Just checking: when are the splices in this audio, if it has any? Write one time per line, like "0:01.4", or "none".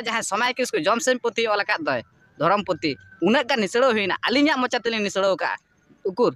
none